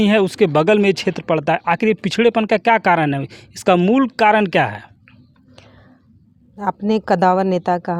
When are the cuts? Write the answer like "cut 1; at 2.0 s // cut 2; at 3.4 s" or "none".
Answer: none